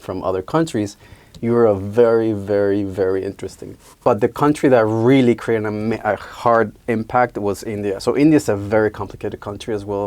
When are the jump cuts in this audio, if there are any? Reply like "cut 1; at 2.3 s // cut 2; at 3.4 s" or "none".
cut 1; at 4.0 s // cut 2; at 8.0 s